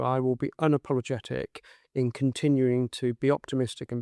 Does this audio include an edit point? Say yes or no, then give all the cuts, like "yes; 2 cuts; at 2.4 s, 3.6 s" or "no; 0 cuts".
no; 0 cuts